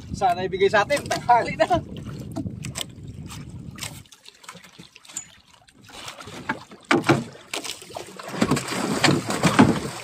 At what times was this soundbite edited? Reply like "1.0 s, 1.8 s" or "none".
4.0 s